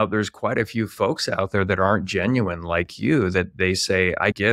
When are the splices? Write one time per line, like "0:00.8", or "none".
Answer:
none

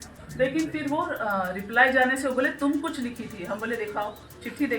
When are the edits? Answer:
none

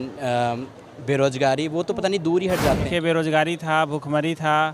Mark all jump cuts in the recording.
0:02.9

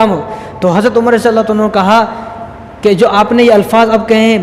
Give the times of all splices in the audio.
none

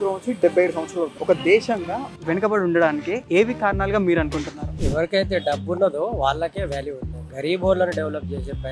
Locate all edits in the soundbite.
none

